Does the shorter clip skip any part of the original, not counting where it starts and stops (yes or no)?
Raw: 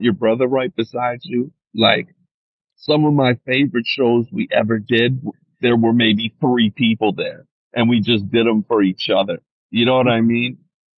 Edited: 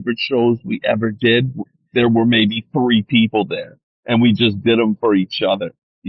no